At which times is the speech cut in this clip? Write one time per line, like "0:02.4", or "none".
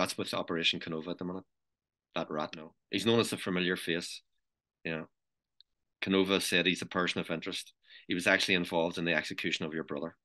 0:02.7